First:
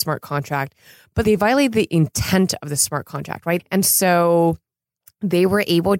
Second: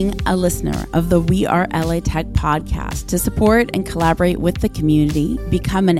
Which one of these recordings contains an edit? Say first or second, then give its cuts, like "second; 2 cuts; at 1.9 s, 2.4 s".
first; 2 cuts; at 1.2 s, 3.7 s